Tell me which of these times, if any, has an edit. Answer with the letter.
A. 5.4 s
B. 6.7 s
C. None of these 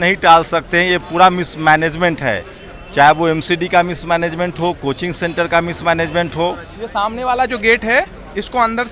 B